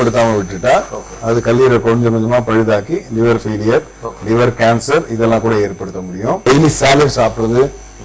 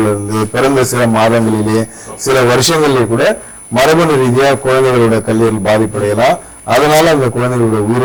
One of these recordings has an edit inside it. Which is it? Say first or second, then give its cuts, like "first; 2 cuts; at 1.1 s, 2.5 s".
first; 1 cut; at 6.5 s